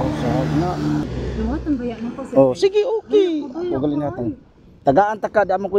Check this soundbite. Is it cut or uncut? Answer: cut